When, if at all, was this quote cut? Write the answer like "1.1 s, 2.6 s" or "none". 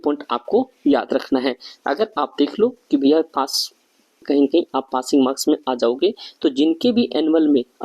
4.2 s